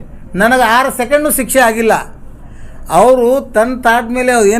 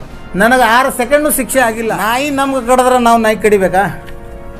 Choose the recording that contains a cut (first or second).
second